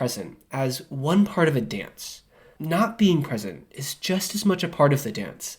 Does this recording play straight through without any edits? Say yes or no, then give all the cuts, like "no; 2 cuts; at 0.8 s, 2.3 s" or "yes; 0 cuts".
no; 1 cut; at 2.5 s